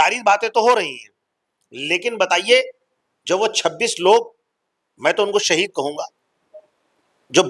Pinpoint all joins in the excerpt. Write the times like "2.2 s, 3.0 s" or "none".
none